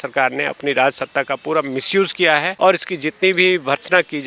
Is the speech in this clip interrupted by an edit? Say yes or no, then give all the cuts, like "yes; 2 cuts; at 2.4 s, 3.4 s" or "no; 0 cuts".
yes; 1 cut; at 2.5 s